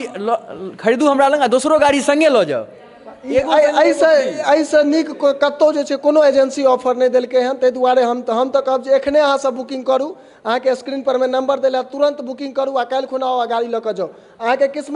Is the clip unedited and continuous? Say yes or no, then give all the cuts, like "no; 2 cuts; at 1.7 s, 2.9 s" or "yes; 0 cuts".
yes; 0 cuts